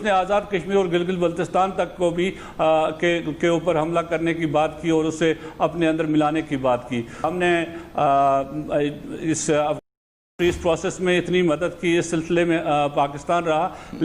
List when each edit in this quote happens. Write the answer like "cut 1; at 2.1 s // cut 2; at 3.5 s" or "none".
cut 1; at 7.3 s